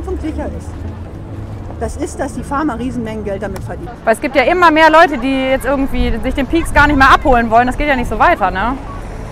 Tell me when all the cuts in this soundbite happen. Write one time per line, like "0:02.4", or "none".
0:03.8